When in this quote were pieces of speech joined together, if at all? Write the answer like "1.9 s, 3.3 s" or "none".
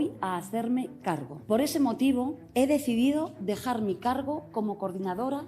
1.3 s, 2.4 s